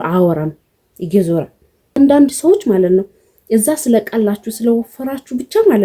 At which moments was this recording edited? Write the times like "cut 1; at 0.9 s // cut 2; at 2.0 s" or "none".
cut 1; at 2.0 s